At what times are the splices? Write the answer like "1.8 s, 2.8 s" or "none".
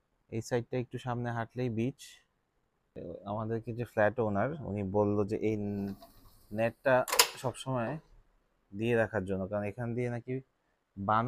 3.0 s